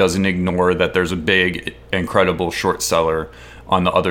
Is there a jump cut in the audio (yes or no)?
no